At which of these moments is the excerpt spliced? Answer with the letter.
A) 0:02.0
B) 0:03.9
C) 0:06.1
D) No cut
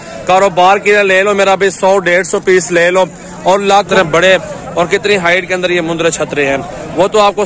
B